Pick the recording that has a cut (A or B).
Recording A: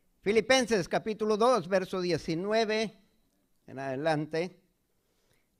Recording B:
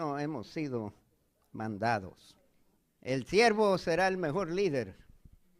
B